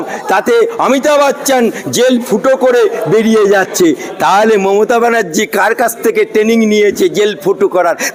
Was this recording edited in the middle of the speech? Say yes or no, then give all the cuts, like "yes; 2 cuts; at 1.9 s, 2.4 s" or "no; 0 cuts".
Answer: no; 0 cuts